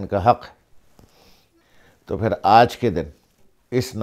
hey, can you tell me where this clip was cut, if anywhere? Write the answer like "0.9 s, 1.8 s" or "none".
1.6 s